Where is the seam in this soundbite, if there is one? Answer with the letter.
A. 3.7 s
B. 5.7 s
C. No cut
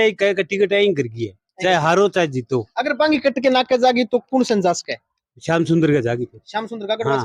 C